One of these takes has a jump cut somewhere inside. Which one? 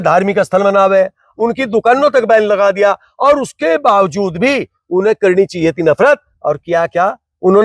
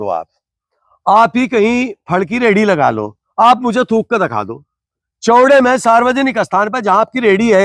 first; 1 cut; at 1.2 s

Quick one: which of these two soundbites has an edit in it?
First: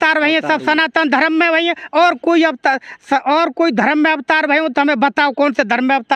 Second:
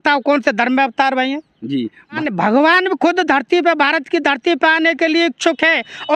second; 1 cut; at 2.2 s

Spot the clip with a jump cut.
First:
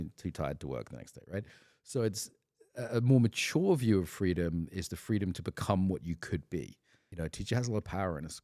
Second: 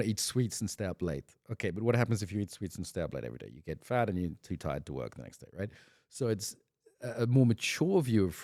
first; 1 cut; at 7.0 s

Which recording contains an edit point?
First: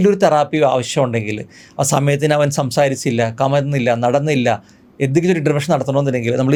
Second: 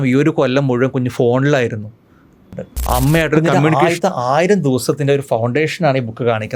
second; 1 cut; at 3.8 s

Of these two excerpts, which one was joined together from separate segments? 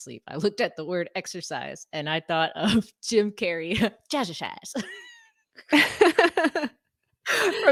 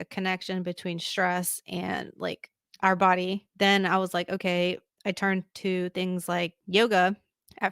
second; 3 cuts; at 3.5 s, 4.9 s, 6.6 s

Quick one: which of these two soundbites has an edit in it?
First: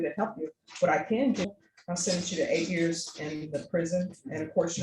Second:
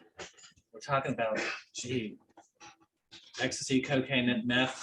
first; 1 cut; at 1.4 s

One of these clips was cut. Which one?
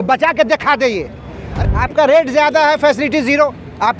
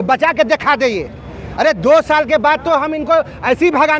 first; 1 cut; at 1.5 s

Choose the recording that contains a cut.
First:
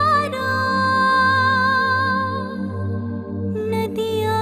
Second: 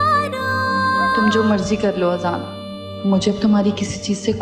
second; 1 cut; at 1.2 s

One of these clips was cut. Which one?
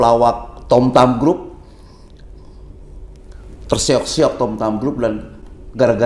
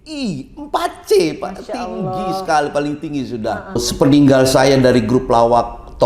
second; 1 cut; at 3.8 s

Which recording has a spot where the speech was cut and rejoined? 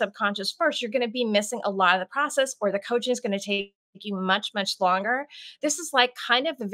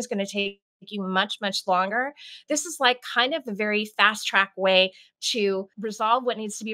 second; 1 cut; at 5.8 s

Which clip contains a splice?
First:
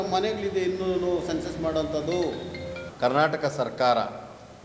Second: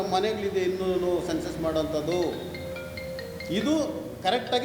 first; 1 cut; at 2.8 s

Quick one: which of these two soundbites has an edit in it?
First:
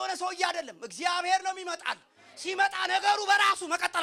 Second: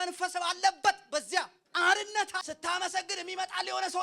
second; 2 cuts; at 1.6 s, 2.4 s

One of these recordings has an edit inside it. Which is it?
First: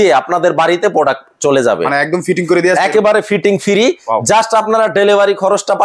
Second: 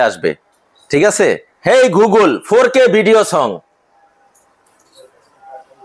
second; 1 cut; at 1.5 s

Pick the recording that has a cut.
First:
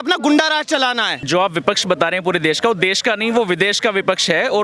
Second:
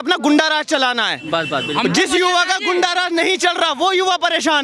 first; 1 cut; at 1.2 s

